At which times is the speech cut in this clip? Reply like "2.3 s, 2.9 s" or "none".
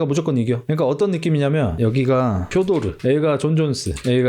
2.9 s